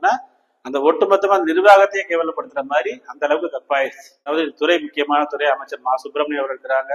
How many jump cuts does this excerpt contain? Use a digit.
1